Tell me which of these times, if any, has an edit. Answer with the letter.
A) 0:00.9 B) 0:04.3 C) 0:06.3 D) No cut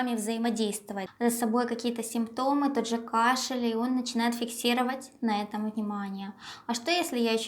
A